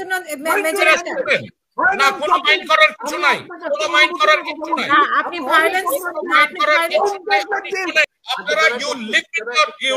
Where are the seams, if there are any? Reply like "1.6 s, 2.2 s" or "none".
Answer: 8.2 s